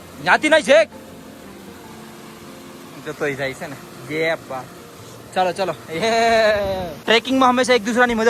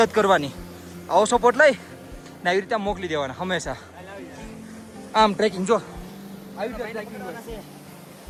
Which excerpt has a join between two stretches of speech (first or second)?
first